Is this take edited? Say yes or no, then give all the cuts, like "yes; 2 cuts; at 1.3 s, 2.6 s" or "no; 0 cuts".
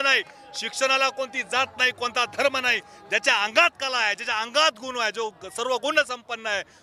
no; 0 cuts